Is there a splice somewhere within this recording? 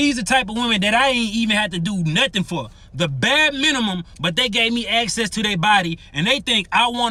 no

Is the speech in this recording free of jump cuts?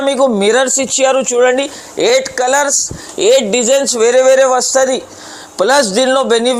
yes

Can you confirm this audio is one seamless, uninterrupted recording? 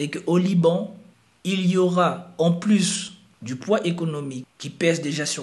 yes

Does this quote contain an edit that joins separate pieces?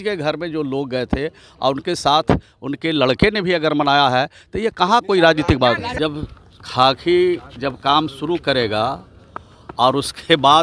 yes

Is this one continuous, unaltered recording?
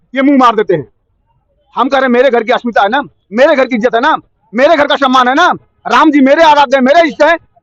yes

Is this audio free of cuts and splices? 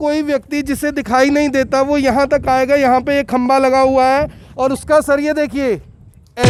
yes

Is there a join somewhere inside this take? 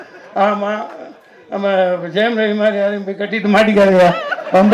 no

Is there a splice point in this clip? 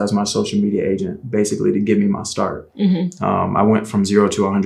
no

